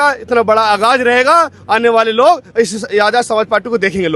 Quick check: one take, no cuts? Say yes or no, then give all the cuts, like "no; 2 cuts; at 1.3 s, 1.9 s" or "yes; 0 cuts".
yes; 0 cuts